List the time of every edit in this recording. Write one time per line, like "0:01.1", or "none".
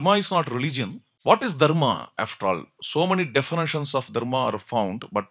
0:01.0